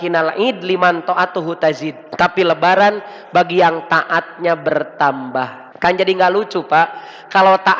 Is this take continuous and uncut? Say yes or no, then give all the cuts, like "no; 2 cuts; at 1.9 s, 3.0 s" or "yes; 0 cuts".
no; 2 cuts; at 2.0 s, 5.6 s